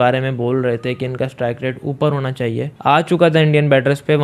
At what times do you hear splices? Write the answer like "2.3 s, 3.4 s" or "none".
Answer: 2.7 s